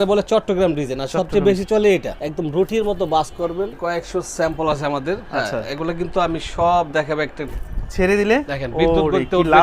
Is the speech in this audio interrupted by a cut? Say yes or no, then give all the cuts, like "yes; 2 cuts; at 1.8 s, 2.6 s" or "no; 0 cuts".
yes; 3 cuts; at 2.2 s, 3.8 s, 7.5 s